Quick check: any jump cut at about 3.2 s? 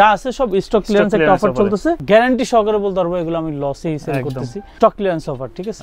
no; 2 cuts; at 2.0 s, 4.7 s

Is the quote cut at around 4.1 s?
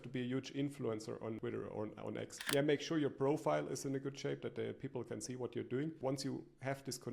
no; 3 cuts; at 1.4 s, 2.4 s, 6.0 s

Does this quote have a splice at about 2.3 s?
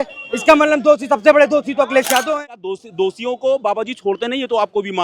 yes; 1 cut; at 2.3 s

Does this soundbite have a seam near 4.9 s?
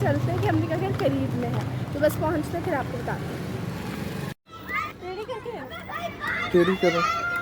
yes; 1 cut; at 4.9 s

